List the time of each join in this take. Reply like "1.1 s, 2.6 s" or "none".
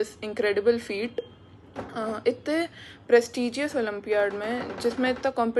none